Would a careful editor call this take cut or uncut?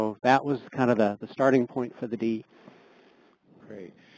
uncut